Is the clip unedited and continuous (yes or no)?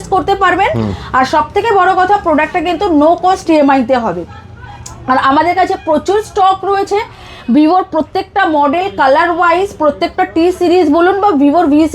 yes